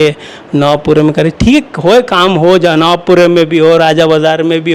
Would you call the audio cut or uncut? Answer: uncut